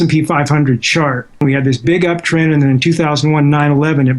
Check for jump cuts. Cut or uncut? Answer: cut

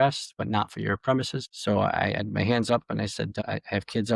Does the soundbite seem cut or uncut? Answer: cut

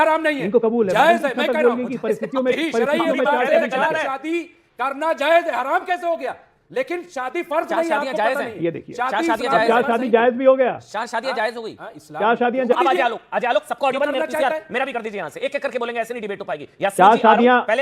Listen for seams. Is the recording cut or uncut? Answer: cut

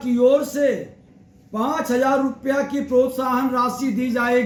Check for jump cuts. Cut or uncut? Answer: uncut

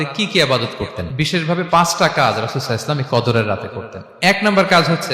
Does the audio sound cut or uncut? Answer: cut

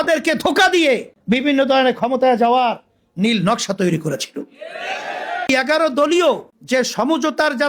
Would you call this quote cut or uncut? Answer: cut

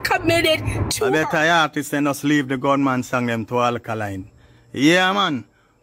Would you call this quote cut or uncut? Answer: cut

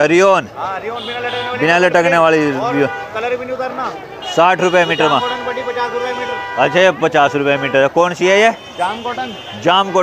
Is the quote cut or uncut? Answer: uncut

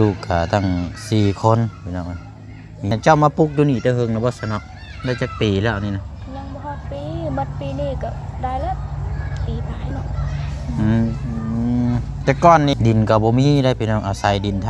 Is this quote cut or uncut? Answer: cut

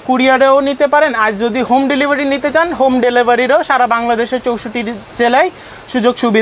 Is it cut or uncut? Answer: uncut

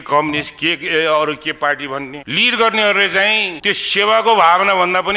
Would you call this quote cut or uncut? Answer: cut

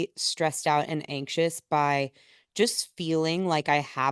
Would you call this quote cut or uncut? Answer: uncut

